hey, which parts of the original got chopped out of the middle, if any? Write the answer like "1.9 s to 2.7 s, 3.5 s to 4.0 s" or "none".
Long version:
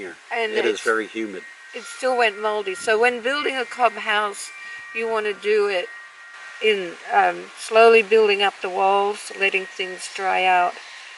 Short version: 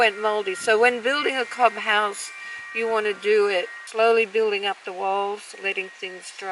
6.0 s to 7.6 s

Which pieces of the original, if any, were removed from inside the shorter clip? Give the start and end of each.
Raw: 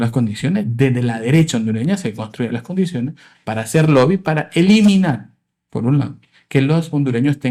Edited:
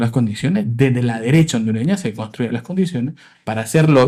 none

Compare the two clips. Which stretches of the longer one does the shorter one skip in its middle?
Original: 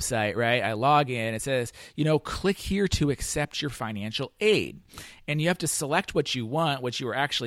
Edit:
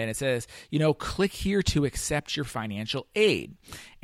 none

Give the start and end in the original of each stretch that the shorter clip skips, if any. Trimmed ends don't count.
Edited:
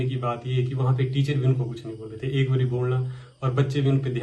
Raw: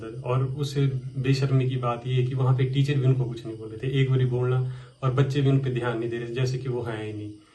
none

